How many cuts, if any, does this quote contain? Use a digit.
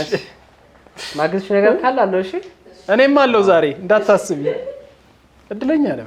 0